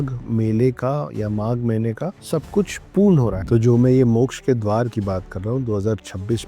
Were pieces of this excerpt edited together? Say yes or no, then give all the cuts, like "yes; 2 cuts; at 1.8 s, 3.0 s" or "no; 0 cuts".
yes; 2 cuts; at 2.2 s, 3.4 s